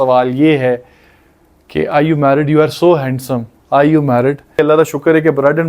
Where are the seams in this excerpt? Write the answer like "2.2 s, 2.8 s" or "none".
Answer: 4.6 s